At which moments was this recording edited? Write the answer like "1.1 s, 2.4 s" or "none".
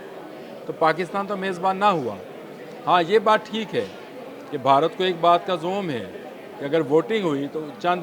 none